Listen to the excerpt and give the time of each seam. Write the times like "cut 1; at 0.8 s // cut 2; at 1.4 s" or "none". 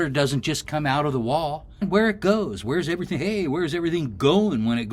cut 1; at 1.8 s